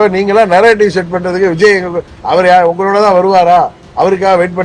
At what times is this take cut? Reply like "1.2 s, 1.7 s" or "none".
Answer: none